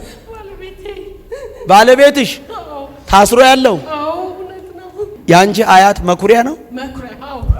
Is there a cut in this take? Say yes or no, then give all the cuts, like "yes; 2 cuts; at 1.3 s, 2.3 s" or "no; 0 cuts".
yes; 1 cut; at 5.1 s